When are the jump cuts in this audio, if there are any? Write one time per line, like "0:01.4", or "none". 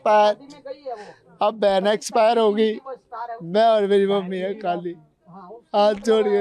none